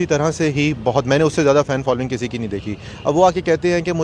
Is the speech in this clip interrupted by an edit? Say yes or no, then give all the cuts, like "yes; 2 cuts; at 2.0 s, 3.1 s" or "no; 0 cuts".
no; 0 cuts